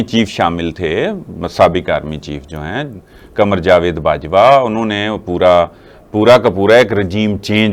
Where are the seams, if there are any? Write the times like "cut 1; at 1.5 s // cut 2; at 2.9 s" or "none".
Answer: none